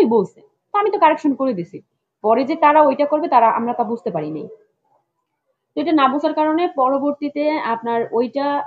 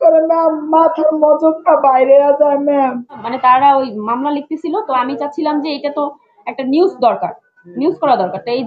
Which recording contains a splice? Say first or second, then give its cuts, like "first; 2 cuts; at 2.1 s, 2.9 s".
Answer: second; 1 cut; at 3.3 s